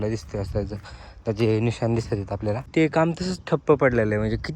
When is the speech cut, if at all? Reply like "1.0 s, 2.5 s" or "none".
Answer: 2.7 s

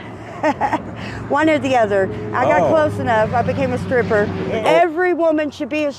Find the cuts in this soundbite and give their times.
4.5 s

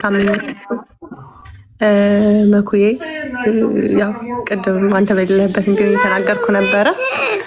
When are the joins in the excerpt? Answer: none

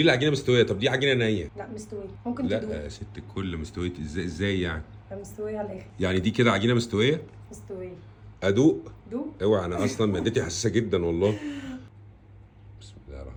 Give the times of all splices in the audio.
none

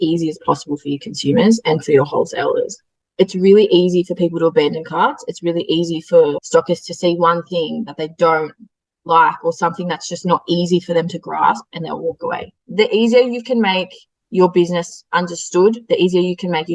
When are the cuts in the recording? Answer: 2.9 s

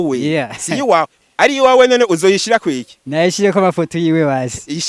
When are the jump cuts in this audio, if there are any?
1.2 s

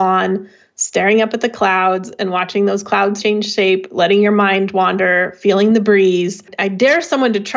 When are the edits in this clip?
3.2 s, 6.5 s

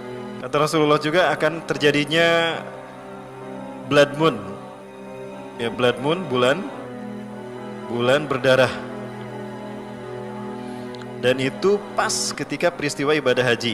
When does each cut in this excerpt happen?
9.2 s, 10.7 s

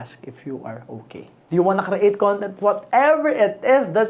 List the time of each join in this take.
1.4 s

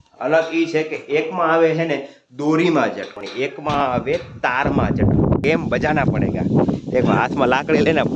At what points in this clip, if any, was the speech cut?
5.4 s

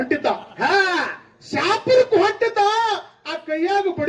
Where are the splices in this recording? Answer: none

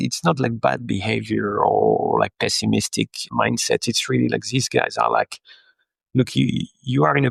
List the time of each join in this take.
none

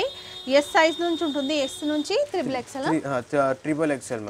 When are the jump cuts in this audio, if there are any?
none

